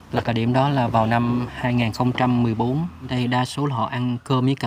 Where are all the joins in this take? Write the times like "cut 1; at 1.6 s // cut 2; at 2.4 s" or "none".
cut 1; at 3.1 s